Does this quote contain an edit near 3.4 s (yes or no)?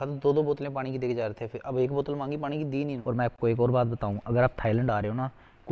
yes